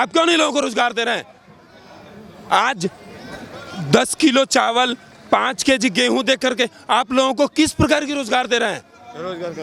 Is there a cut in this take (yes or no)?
no